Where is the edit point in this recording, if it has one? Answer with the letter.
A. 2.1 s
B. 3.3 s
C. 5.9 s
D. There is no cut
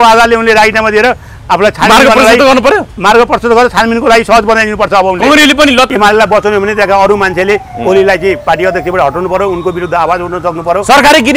C